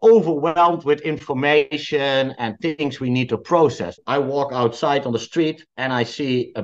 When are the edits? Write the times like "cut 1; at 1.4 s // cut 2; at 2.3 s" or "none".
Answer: cut 1; at 4.0 s